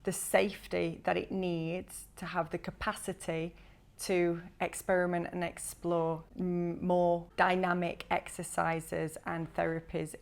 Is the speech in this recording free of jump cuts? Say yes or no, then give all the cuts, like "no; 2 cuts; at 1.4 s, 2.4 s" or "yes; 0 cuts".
no; 2 cuts; at 6.3 s, 7.3 s